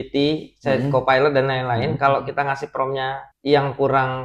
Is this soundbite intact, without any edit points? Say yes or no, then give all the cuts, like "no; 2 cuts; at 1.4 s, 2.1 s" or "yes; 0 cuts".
no; 1 cut; at 3.3 s